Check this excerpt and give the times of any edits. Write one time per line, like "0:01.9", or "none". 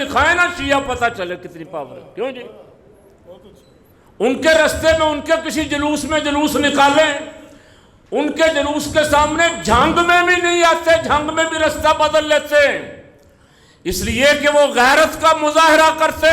none